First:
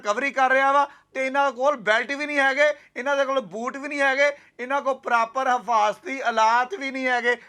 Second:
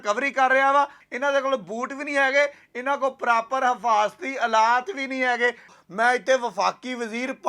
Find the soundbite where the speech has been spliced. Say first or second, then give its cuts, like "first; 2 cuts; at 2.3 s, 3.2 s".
second; 2 cuts; at 1.0 s, 5.8 s